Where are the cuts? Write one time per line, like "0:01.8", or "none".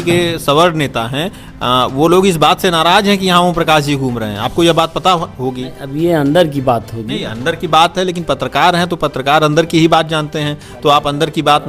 none